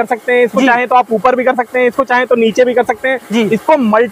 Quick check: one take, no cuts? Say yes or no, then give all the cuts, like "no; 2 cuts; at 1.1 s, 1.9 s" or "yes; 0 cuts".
yes; 0 cuts